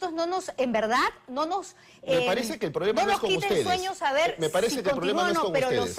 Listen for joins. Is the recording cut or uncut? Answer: uncut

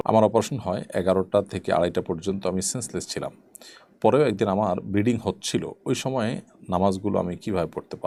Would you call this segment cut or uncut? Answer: uncut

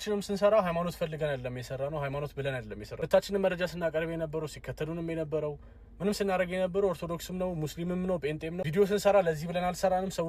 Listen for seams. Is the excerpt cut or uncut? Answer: uncut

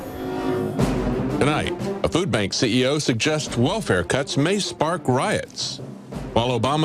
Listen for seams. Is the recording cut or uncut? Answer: cut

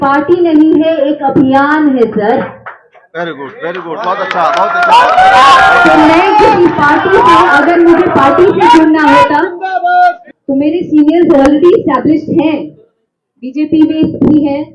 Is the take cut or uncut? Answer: cut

